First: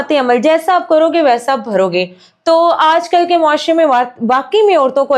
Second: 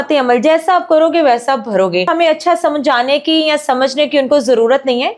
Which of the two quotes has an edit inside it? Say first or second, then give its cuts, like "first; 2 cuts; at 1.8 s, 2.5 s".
second; 1 cut; at 2.1 s